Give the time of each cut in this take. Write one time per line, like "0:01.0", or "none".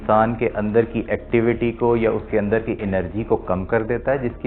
none

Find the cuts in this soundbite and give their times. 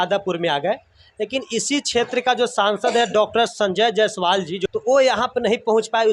0:04.6

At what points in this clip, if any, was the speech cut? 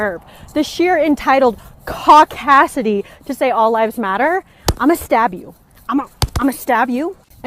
none

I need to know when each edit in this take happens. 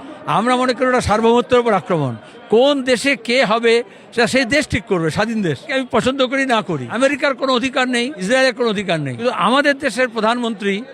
0:05.7
0:06.9
0:08.2
0:09.1

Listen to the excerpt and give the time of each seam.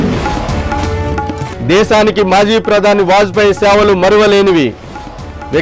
0:01.5

